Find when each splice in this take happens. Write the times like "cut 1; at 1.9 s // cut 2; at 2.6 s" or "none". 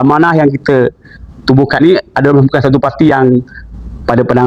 none